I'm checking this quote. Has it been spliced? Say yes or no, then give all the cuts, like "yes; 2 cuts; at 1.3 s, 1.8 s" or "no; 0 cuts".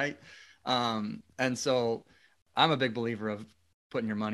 yes; 1 cut; at 2.4 s